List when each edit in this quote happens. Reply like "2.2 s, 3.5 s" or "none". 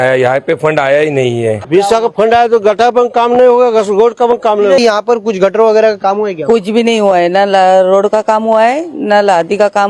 1.6 s, 4.8 s